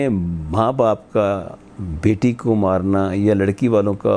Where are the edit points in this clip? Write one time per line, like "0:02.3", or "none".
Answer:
none

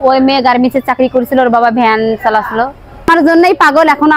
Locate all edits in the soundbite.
0:03.1

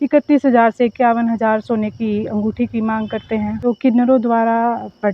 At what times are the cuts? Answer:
0:03.6

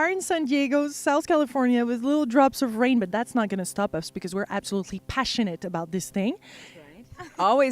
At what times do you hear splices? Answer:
0:04.6

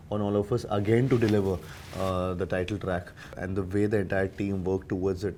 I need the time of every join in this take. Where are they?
none

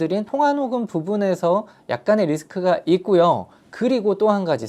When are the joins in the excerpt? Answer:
none

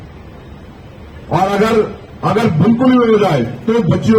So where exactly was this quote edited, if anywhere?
none

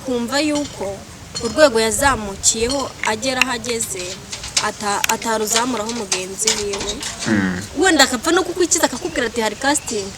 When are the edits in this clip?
0:07.6

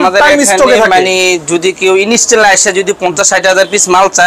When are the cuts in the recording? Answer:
none

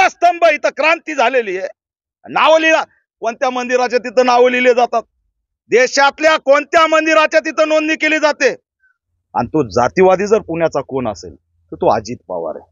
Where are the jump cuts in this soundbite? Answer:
0:09.0

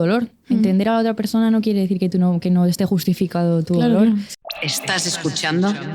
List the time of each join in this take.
0:04.3

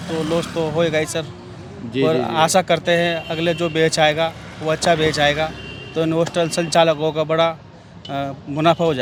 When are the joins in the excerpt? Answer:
none

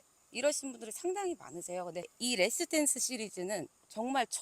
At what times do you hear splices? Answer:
0:02.1

